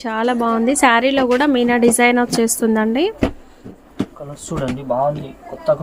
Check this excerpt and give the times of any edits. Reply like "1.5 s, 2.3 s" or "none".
none